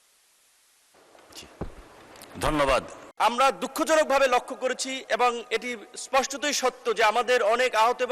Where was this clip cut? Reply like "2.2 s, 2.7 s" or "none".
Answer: 3.0 s